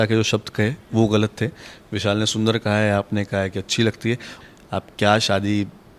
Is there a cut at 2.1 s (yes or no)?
no